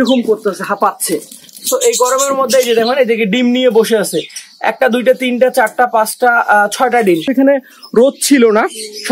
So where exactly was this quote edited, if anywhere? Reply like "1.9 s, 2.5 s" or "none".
7.3 s